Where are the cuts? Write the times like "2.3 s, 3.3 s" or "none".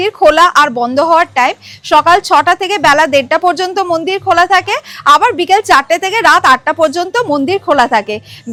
none